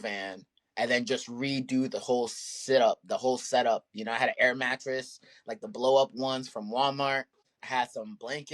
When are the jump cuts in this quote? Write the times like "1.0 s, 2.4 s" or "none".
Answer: none